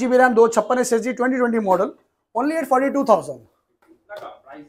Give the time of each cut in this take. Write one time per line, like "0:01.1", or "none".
none